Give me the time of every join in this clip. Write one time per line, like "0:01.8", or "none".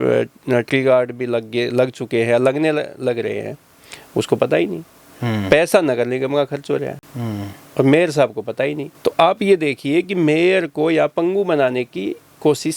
none